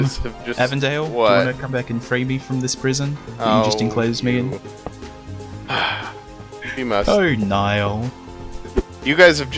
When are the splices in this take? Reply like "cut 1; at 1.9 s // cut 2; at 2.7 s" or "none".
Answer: none

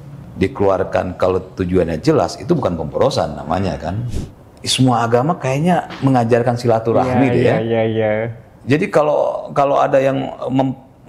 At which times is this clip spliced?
cut 1; at 4.1 s

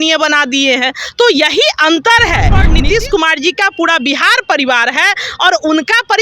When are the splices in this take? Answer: cut 1; at 2.6 s

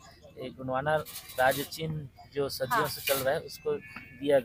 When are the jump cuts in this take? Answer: none

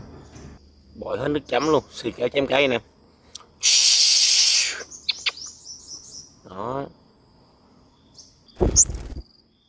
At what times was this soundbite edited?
cut 1; at 8.5 s

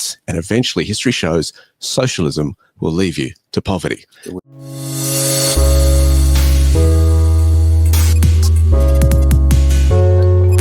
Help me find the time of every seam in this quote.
cut 1; at 4.2 s

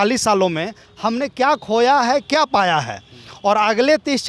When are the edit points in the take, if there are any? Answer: none

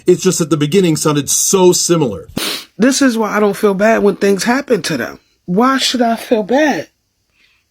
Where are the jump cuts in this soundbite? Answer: cut 1; at 2.4 s

